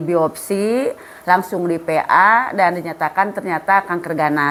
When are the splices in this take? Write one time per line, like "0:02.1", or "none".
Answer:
none